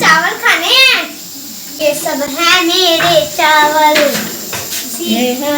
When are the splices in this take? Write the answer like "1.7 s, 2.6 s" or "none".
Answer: 1.7 s